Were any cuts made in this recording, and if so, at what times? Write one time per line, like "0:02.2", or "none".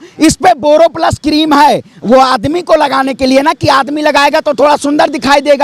none